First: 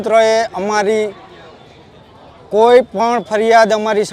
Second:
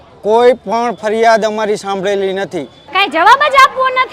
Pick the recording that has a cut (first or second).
second